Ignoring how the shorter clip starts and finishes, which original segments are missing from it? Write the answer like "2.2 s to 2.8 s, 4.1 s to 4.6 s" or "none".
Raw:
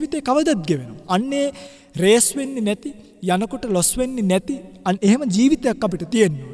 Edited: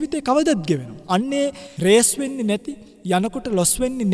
1.6 s to 1.8 s